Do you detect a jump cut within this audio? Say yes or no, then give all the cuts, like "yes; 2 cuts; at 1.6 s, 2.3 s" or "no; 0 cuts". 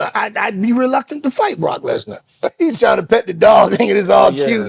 yes; 1 cut; at 2.3 s